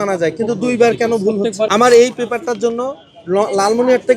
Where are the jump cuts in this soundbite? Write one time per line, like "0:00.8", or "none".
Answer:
0:01.7